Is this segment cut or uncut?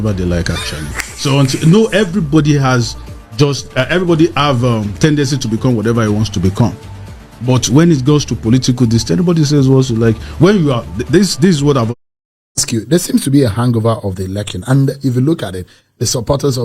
cut